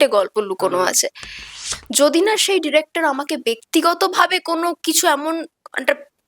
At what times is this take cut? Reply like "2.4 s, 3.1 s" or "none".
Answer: 1.5 s